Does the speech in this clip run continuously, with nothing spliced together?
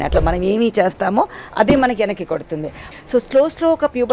no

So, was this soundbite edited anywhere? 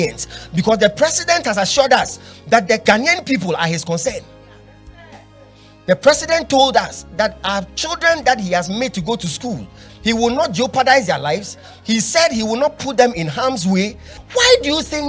yes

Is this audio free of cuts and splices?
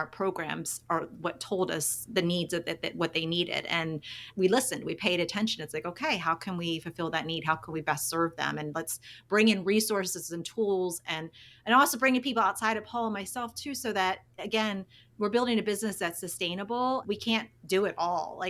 no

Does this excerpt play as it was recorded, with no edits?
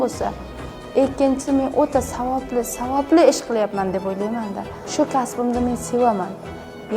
no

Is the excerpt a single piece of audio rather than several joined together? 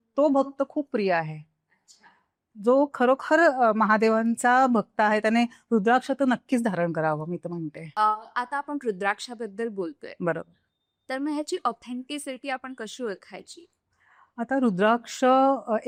yes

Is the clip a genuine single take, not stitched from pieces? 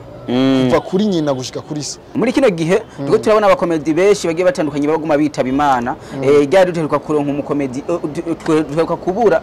no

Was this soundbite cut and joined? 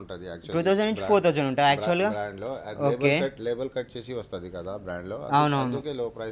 no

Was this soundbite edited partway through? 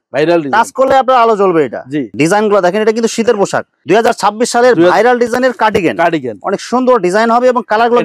yes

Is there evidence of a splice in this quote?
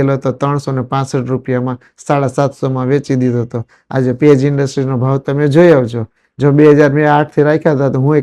no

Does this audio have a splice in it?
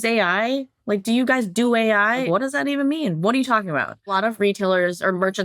yes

